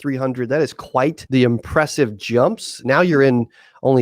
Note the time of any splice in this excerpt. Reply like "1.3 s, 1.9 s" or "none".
1.2 s